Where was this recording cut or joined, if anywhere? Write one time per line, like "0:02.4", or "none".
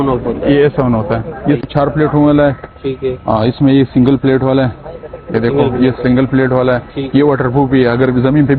0:01.6